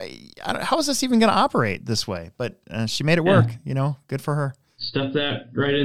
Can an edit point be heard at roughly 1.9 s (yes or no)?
no